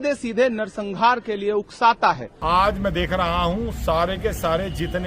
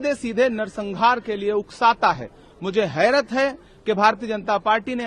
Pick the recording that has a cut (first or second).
first